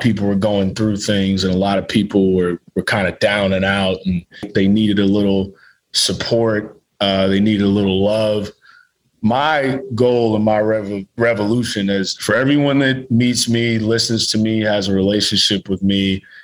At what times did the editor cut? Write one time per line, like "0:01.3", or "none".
0:04.5
0:12.1